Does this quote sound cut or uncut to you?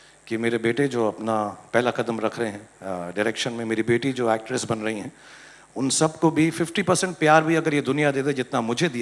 uncut